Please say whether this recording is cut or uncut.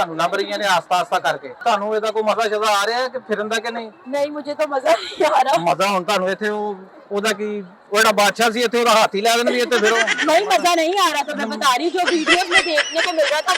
cut